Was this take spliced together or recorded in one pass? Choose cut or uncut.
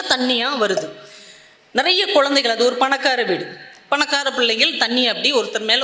uncut